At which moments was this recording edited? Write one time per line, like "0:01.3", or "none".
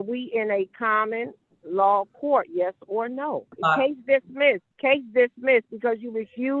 0:03.5
0:04.7